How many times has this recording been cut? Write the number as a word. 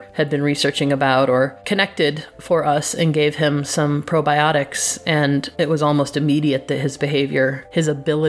zero